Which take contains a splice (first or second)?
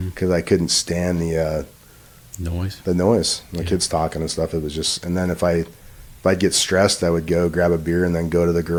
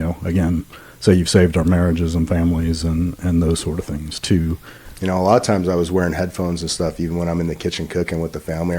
second